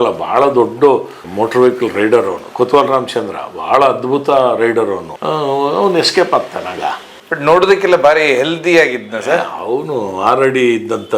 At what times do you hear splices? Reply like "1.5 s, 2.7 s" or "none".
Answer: none